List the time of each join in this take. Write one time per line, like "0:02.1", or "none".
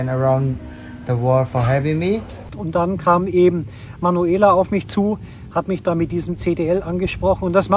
0:02.6